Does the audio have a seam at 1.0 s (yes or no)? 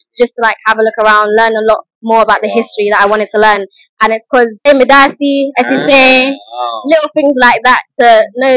no